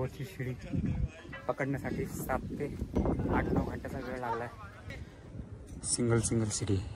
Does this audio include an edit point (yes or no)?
yes